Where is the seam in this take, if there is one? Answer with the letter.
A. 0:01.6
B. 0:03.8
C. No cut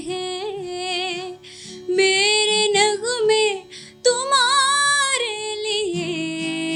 C